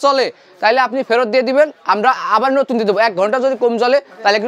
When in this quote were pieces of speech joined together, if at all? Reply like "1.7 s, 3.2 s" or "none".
none